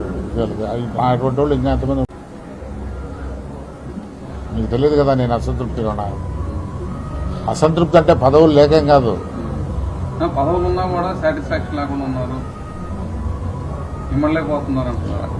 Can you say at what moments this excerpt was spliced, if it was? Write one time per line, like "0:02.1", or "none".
0:02.1